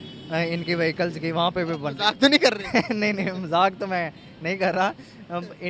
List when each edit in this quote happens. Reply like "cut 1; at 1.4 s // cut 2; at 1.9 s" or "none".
none